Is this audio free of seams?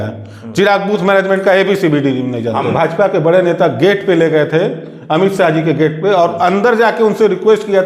no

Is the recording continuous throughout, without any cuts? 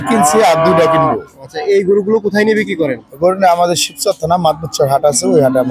yes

